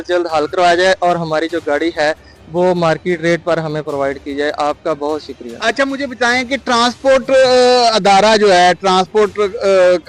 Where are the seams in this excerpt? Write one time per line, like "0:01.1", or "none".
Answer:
none